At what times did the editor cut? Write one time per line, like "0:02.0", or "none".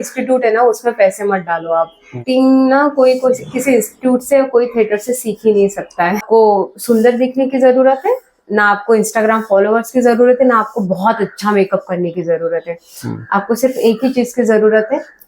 0:02.2
0:06.2